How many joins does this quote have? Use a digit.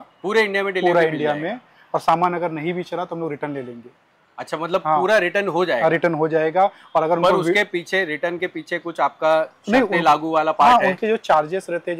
0